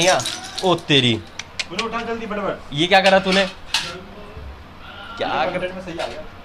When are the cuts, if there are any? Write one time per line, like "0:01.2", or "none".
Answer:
none

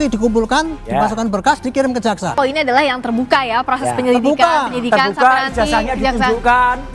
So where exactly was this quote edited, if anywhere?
0:02.3

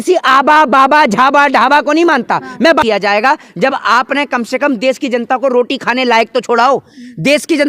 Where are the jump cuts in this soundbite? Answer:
0:02.8

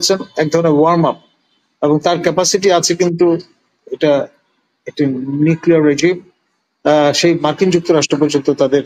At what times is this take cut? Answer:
none

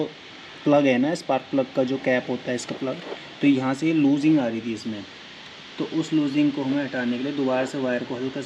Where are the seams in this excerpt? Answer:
none

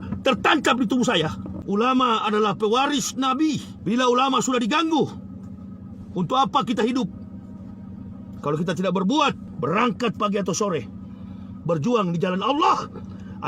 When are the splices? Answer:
0:01.5
0:03.7
0:09.5

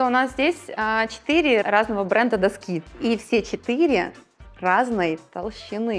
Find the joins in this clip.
0:01.6
0:02.9

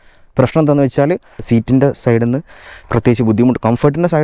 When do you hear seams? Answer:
0:01.4

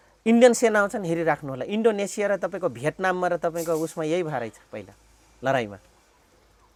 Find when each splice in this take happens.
none

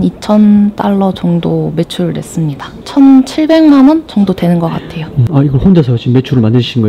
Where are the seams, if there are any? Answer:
0:02.7
0:05.1

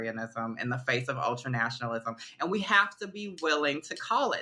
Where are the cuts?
none

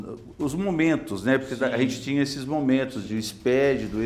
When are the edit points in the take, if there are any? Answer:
none

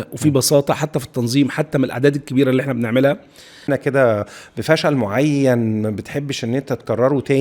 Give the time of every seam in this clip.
0:03.7

